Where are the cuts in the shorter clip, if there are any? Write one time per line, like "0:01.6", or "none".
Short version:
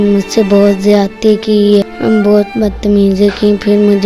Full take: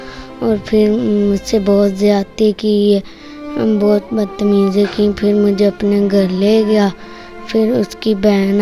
0:01.9